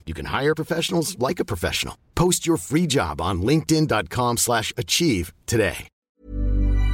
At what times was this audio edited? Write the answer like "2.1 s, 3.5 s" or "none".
5.9 s